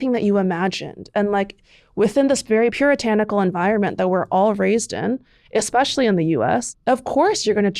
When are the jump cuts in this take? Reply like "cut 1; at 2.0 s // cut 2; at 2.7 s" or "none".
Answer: cut 1; at 6.7 s